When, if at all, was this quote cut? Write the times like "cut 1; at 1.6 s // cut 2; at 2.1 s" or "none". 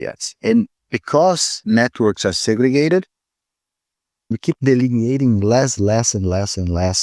cut 1; at 1.5 s // cut 2; at 4.4 s